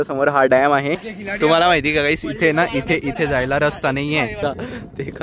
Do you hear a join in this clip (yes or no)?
yes